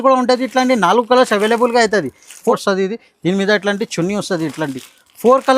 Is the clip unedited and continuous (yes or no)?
no